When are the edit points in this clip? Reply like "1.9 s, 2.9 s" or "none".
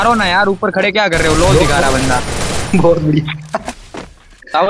none